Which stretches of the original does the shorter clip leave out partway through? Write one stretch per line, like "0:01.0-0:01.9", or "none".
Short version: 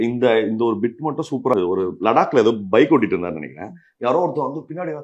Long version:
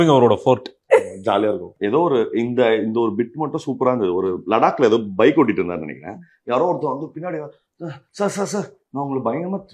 0:03.9-0:04.0